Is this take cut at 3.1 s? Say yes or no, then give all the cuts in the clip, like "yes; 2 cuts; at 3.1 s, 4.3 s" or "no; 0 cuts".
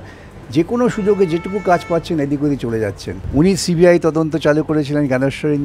yes; 1 cut; at 3.1 s